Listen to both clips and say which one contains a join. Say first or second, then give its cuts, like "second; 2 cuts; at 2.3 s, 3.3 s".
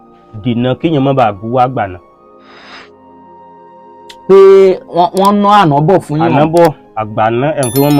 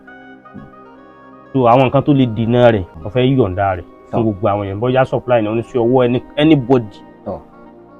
second; 1 cut; at 2.9 s